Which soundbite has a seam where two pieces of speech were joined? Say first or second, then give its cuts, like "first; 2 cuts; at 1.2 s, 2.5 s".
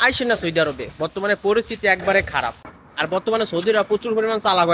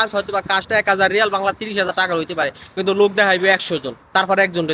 first; 1 cut; at 2.7 s